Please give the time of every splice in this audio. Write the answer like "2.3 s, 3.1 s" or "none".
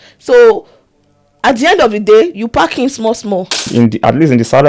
3.7 s